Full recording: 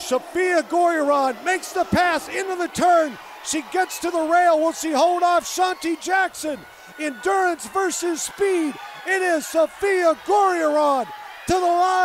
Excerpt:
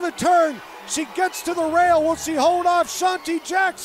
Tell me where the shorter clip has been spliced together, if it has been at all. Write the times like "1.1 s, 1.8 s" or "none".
none